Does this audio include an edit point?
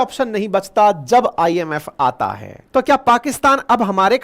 yes; 1 cut; at 2.5 s

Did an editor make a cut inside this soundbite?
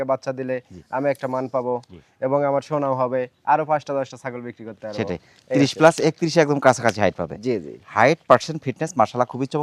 no; 0 cuts

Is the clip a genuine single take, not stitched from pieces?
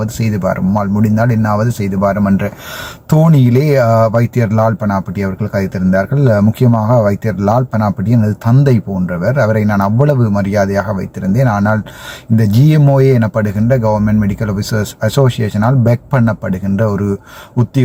yes; 0 cuts

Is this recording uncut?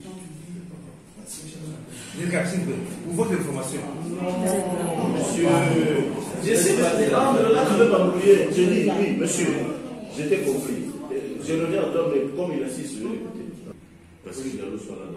no; 1 cut; at 13.7 s

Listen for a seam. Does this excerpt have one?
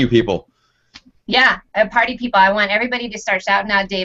no; 0 cuts

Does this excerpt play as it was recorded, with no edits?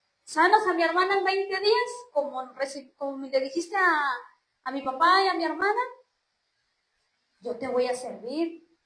yes; 0 cuts

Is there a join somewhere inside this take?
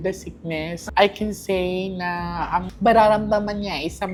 no; 0 cuts

